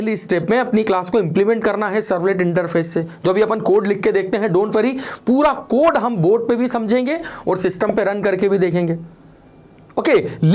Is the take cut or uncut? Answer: uncut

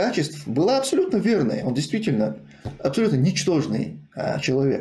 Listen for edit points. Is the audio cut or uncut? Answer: uncut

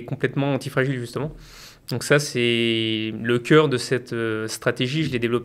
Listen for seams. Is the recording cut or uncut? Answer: uncut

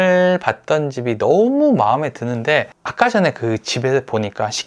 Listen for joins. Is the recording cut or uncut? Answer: cut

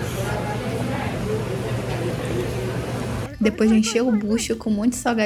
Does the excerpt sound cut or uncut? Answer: uncut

